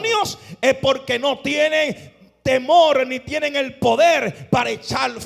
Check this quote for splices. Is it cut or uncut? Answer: uncut